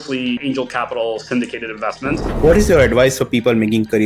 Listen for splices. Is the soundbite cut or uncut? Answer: cut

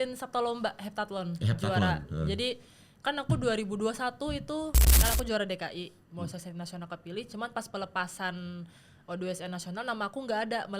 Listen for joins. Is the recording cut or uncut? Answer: cut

